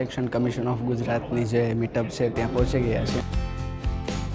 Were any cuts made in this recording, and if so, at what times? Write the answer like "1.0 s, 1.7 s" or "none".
none